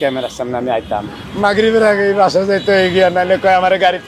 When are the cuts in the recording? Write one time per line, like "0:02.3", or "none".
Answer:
0:01.2

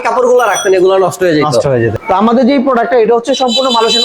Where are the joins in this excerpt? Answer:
0:01.9

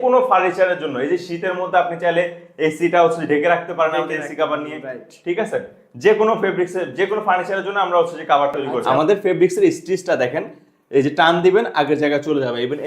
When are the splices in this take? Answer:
0:08.8

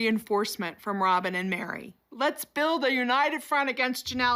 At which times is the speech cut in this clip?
none

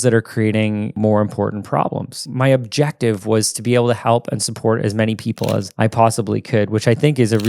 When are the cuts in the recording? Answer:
0:00.9
0:02.2

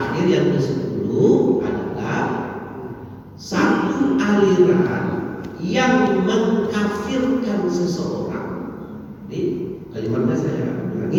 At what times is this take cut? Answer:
none

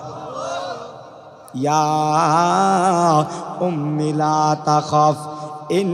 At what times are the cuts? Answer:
0:01.4

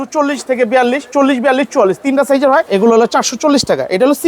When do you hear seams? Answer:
0:02.7

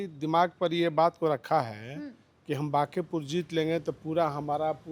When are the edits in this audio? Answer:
none

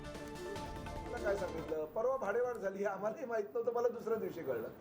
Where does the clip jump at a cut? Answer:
0:01.2

